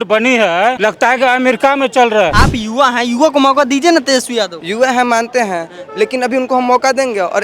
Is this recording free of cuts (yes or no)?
no